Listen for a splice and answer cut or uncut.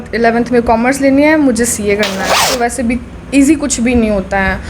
cut